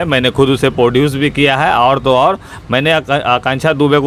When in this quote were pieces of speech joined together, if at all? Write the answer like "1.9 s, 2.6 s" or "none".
none